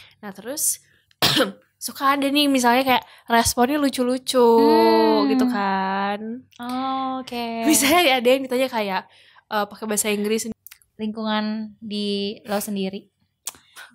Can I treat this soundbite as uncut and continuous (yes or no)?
no